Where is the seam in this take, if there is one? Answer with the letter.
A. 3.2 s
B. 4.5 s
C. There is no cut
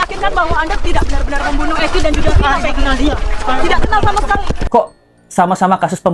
B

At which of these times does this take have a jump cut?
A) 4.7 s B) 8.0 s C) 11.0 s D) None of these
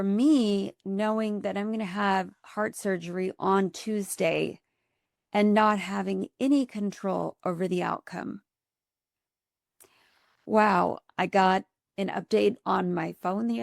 C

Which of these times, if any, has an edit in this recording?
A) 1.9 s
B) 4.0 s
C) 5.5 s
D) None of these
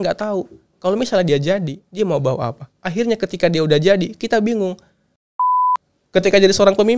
C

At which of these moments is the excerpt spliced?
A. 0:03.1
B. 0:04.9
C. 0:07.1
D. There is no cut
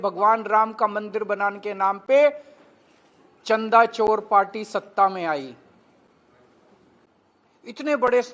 C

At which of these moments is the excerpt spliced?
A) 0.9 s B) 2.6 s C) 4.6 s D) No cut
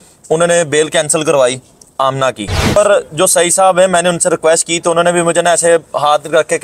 B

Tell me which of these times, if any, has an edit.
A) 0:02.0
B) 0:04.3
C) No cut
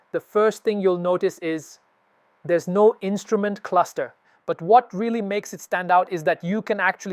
B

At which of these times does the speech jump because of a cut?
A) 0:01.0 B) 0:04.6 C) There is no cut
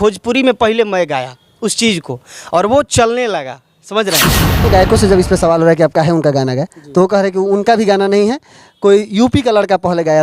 B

